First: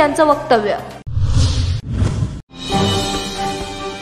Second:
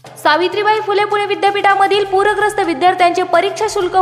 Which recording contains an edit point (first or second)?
first